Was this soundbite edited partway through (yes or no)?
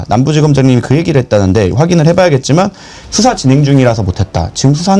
no